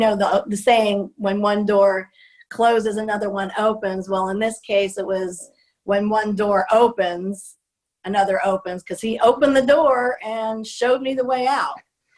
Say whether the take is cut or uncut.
uncut